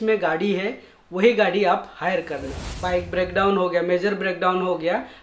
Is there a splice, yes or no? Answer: yes